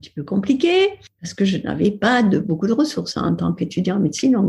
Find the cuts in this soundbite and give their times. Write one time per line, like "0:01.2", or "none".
0:01.0